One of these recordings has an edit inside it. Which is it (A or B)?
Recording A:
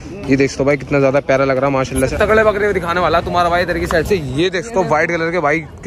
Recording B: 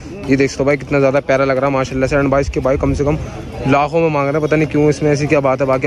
A